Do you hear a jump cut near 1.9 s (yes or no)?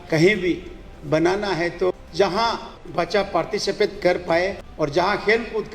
yes